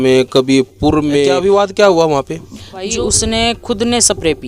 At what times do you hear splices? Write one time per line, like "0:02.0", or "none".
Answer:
0:01.3
0:02.9

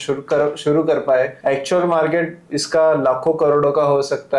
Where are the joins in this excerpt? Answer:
0:01.4

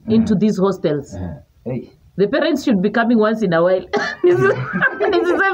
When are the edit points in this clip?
none

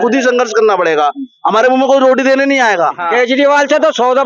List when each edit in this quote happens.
0:03.0

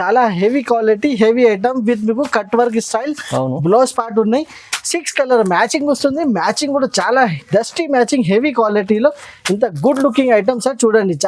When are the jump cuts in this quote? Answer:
none

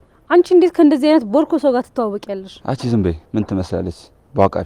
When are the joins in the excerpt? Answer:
0:02.5
0:03.6

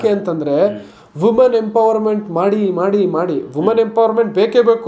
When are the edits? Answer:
none

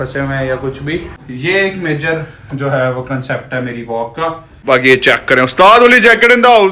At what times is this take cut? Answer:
0:01.3
0:04.5

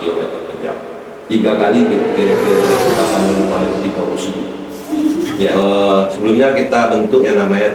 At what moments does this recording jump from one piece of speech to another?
0:05.5

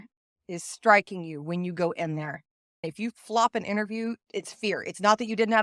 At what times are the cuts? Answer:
0:02.9

